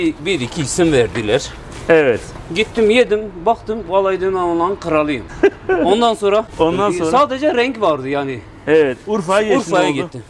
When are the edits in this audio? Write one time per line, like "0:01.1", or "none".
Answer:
none

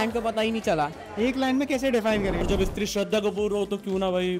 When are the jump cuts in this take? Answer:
0:02.5

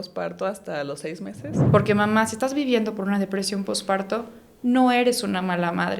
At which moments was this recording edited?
0:01.5

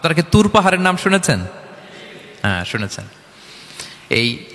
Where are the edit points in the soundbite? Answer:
none

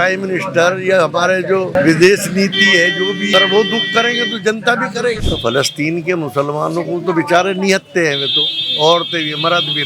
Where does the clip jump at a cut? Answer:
0:01.8
0:03.3
0:05.2

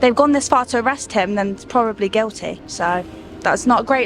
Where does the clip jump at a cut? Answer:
none

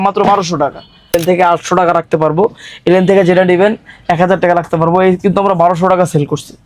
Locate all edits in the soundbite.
0:01.1

